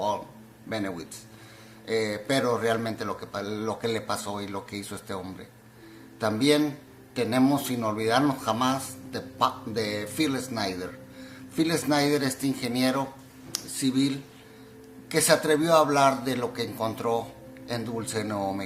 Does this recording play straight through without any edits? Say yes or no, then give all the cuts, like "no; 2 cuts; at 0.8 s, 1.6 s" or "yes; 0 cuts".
no; 1 cut; at 5.4 s